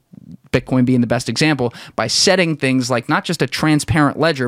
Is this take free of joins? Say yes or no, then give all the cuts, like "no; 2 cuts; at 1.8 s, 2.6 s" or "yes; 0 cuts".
yes; 0 cuts